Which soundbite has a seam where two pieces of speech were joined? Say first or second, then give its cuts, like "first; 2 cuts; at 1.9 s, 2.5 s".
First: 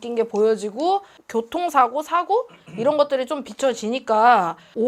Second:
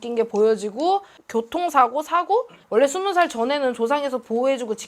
second; 1 cut; at 2.6 s